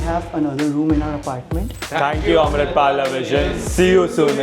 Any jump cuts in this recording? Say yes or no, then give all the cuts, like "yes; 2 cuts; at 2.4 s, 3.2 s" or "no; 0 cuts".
yes; 1 cut; at 1.8 s